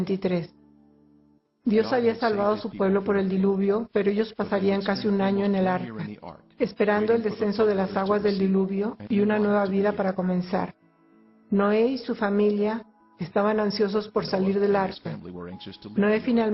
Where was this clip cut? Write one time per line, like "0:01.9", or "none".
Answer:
none